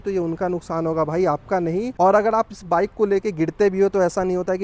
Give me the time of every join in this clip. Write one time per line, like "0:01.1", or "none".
none

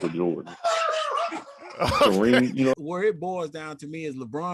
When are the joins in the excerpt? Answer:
0:02.7

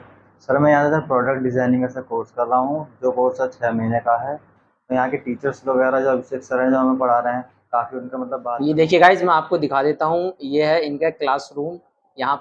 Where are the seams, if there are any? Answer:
0:08.4

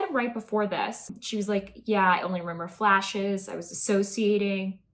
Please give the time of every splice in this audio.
0:01.1

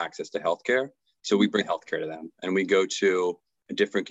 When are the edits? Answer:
0:01.6

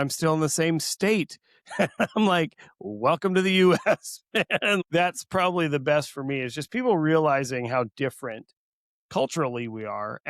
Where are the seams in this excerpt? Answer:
0:04.8

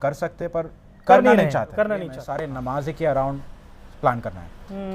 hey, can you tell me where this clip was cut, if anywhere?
0:02.2

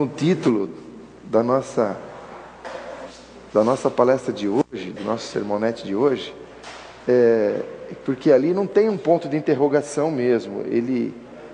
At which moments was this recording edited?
none

